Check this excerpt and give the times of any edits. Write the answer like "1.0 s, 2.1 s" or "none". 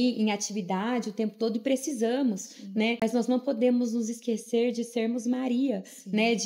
3.0 s